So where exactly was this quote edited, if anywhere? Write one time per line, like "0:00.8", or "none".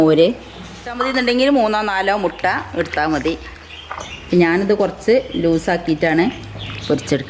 0:00.9